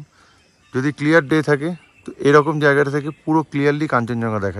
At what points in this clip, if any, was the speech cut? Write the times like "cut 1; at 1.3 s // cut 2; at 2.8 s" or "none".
none